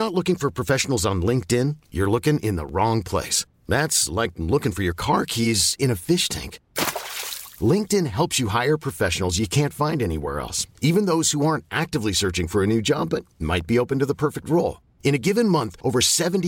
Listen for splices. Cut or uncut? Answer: uncut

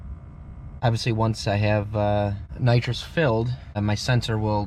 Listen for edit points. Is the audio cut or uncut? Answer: cut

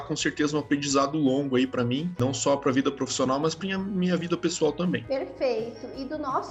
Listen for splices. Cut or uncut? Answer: uncut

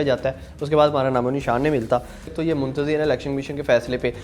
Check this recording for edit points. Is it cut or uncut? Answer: cut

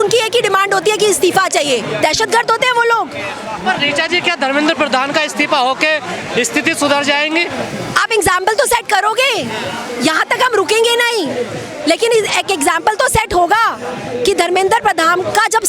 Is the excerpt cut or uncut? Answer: uncut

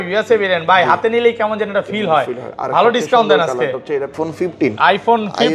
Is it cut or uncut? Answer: cut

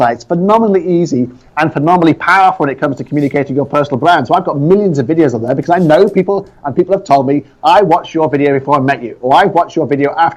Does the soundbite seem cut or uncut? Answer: uncut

